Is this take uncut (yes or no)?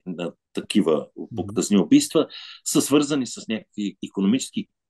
yes